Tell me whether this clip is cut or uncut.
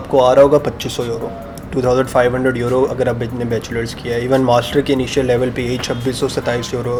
uncut